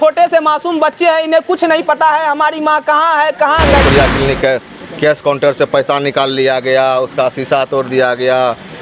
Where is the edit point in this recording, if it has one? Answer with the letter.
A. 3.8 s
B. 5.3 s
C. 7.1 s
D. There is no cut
A